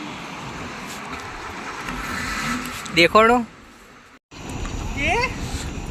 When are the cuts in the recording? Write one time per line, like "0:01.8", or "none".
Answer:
0:04.2